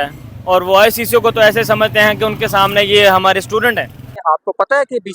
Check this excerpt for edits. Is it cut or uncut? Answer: cut